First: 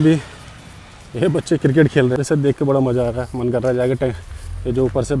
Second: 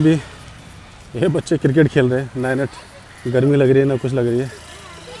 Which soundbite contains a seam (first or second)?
first